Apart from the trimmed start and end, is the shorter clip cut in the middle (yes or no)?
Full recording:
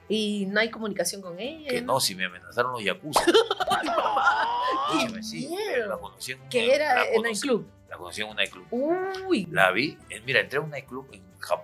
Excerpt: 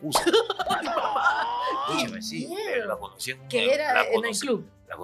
no